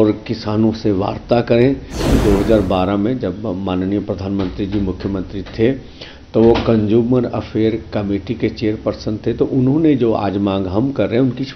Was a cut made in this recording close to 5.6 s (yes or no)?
no